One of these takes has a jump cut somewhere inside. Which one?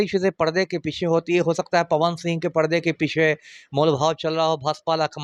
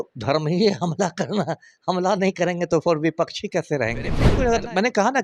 second; 1 cut; at 4.3 s

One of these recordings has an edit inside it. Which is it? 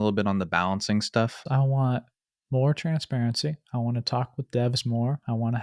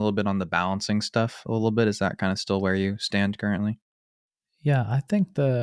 first; 1 cut; at 1.4 s

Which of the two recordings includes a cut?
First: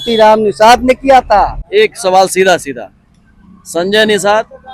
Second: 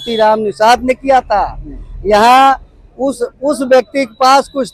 first; 1 cut; at 1.6 s

